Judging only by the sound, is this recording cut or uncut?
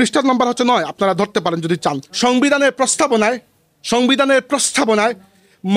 cut